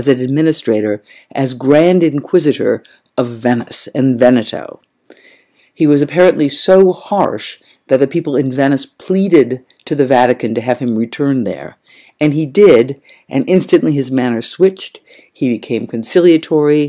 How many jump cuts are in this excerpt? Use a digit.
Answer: 0